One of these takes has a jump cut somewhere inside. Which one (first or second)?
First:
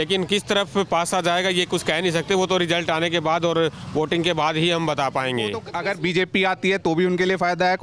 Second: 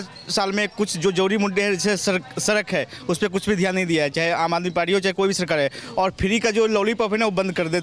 first